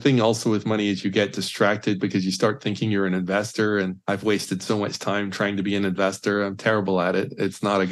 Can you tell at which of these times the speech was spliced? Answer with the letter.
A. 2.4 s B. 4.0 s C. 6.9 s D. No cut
B